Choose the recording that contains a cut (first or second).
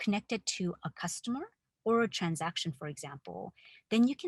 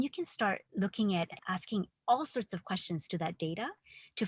second